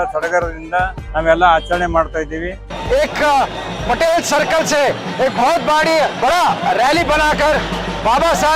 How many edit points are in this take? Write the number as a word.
two